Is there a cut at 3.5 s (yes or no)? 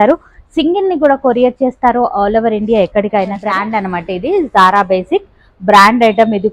yes